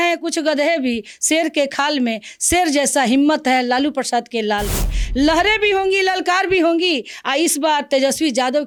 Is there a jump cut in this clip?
no; 0 cuts

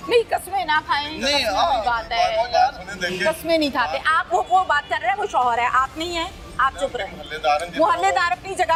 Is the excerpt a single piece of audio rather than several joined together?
yes; 0 cuts

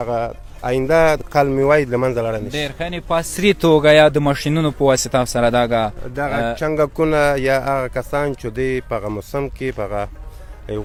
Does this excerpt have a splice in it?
no; 0 cuts

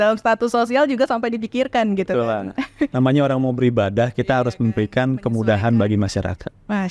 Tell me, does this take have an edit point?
no; 0 cuts

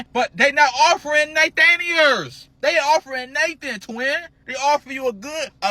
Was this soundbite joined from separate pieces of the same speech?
no; 0 cuts

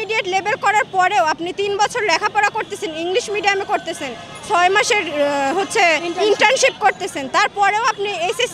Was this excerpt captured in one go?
yes; 0 cuts

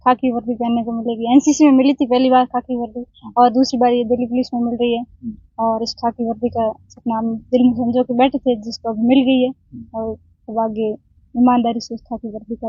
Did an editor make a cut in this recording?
no; 0 cuts

